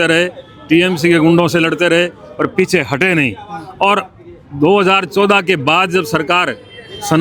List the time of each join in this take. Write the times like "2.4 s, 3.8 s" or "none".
none